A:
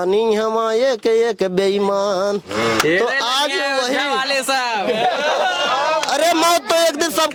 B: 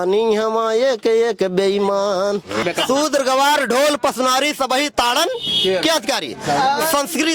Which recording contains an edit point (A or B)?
B